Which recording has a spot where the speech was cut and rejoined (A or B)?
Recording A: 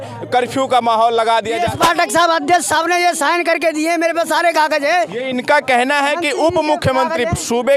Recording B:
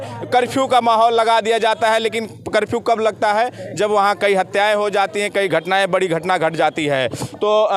A